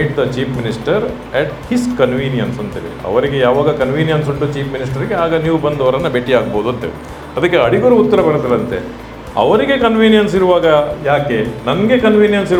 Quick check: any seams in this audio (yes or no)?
no